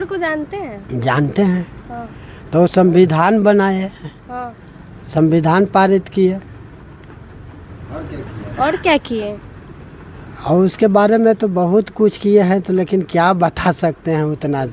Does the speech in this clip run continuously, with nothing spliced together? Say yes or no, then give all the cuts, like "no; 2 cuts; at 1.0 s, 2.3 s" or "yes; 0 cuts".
yes; 0 cuts